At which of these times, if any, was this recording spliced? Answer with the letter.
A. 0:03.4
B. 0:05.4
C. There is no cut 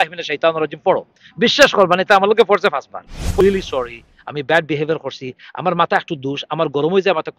A